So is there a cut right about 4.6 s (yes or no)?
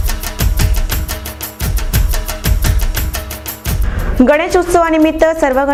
no